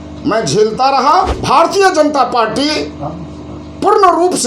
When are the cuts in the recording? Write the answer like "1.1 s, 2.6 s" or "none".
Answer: 1.4 s